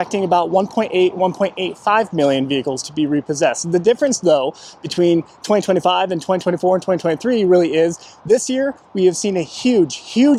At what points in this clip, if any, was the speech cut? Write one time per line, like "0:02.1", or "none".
none